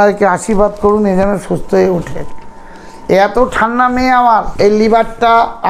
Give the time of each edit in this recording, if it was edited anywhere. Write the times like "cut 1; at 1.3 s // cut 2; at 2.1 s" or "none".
cut 1; at 4.5 s